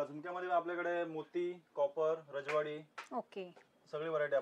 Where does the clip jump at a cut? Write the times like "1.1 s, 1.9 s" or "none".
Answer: none